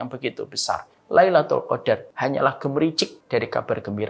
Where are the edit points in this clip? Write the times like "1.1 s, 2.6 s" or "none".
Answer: 0.9 s, 2.1 s, 3.1 s